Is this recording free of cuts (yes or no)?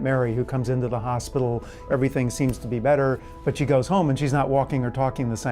no